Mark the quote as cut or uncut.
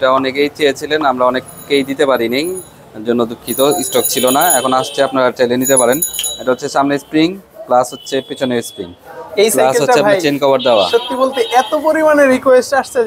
uncut